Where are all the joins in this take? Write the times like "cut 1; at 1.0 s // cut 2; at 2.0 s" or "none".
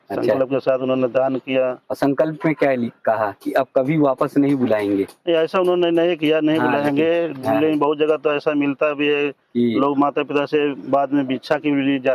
none